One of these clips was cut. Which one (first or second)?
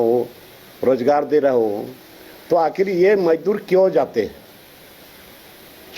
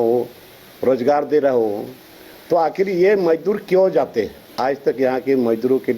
second